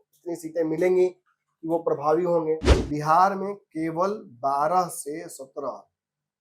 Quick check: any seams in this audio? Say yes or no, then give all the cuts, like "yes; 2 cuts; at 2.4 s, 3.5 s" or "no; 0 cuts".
yes; 1 cut; at 2.8 s